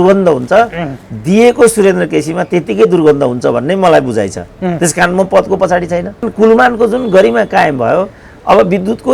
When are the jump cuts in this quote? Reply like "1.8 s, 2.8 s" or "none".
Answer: 6.3 s